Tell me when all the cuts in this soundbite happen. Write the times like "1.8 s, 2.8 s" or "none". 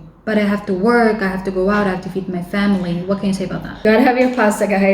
3.8 s